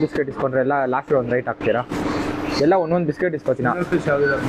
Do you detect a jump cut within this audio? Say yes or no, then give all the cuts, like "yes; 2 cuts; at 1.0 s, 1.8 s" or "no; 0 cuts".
no; 0 cuts